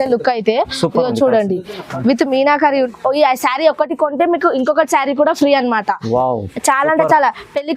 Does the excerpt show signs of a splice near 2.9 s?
yes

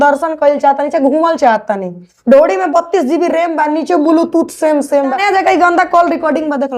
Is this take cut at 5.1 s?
yes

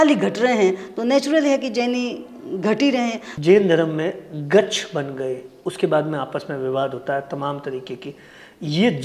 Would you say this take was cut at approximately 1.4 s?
no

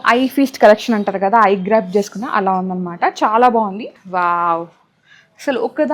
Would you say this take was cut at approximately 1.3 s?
no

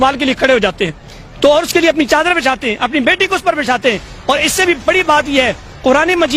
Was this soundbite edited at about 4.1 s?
no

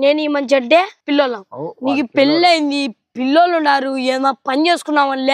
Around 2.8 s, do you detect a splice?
no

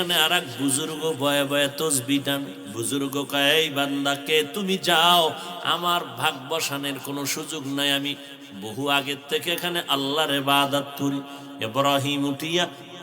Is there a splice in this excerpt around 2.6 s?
yes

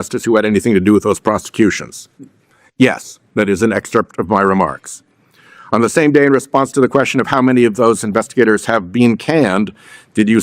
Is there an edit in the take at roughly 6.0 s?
no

